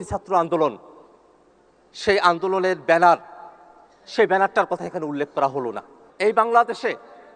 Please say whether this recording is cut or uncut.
cut